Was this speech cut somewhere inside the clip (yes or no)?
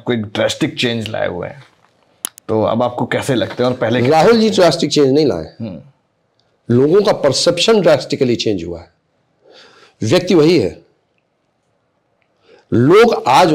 no